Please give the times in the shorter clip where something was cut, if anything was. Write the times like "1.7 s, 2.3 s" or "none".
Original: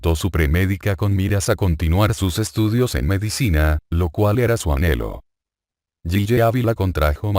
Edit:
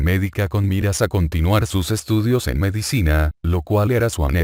none